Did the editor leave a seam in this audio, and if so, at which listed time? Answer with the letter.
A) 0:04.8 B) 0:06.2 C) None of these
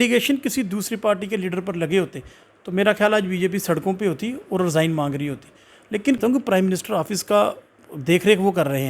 B